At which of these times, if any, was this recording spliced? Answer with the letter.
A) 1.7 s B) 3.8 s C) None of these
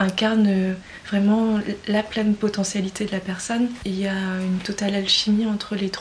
B